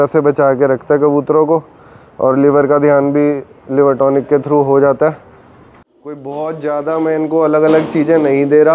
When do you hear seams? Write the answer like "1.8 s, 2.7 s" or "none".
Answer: 6.2 s

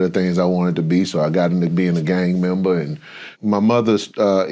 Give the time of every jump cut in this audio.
3.3 s

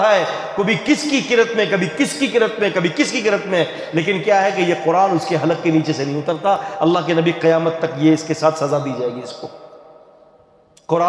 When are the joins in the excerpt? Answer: none

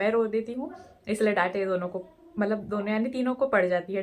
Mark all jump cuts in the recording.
none

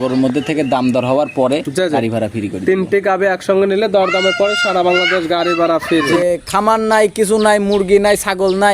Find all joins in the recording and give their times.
6.2 s

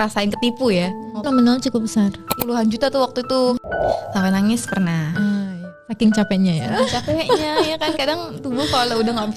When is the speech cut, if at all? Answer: 1.3 s, 2.3 s, 3.6 s, 5.5 s

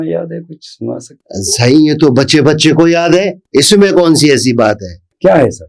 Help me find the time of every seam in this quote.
none

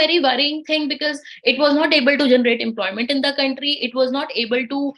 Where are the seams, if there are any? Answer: none

